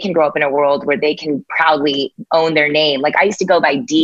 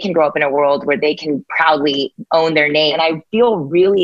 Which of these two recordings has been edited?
second; 1 cut; at 2.9 s

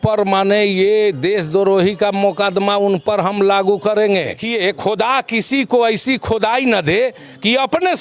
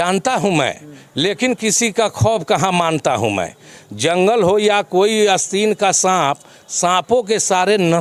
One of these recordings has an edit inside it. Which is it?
first; 1 cut; at 4.4 s

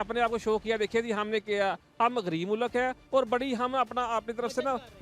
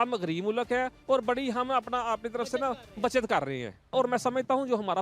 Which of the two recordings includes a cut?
second; 1 cut; at 3.9 s

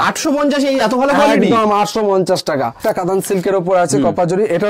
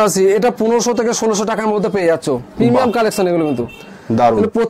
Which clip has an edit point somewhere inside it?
first; 1 cut; at 2.8 s

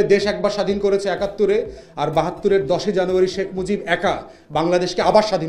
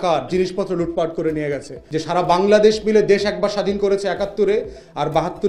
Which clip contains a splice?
second; 1 cut; at 1.7 s

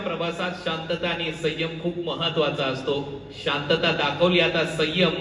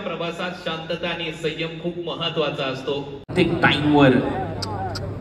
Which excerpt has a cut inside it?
second; 1 cut; at 3.3 s

